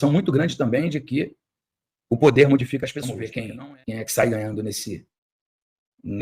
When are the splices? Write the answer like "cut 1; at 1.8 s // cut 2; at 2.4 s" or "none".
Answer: cut 1; at 3.2 s

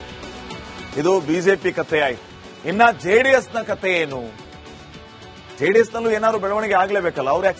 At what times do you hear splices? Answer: cut 1; at 0.9 s

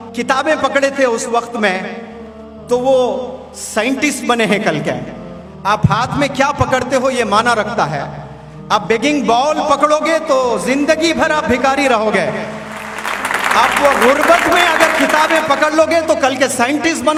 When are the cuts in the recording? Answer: none

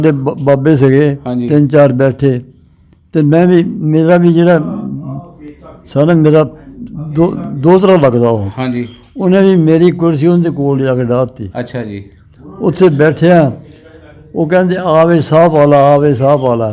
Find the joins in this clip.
none

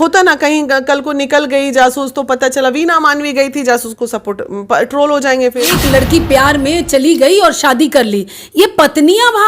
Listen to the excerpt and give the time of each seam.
cut 1; at 5.7 s

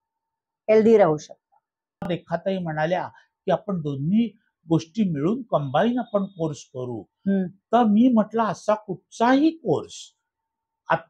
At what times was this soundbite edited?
cut 1; at 2.1 s

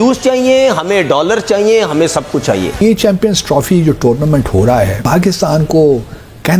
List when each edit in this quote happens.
cut 1; at 2.8 s // cut 2; at 5.0 s

